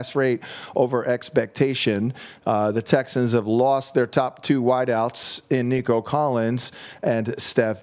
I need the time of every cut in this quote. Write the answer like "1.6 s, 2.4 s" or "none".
none